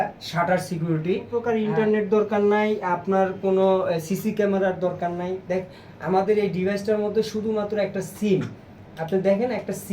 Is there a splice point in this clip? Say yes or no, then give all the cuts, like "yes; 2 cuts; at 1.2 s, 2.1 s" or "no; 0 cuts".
yes; 1 cut; at 1.7 s